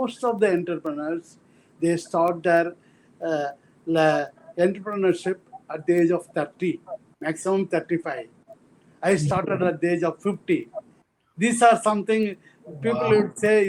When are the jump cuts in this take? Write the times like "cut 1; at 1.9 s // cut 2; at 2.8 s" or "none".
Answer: none